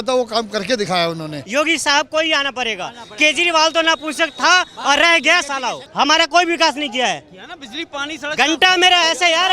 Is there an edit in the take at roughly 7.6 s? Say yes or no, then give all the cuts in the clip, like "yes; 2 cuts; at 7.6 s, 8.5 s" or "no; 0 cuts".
no; 2 cuts; at 1.4 s, 5.8 s